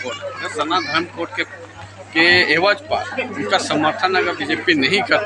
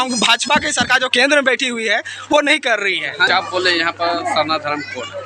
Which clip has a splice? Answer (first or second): second